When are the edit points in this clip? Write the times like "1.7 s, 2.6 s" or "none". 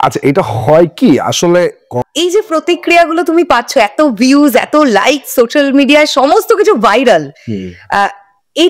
1.9 s

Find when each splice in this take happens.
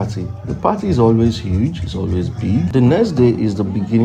2.7 s

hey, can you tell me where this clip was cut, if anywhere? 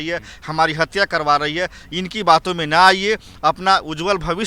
none

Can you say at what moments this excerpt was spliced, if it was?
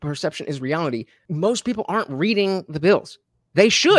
1.2 s

